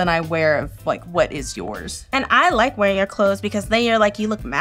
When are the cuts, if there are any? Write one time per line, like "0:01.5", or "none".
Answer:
0:02.0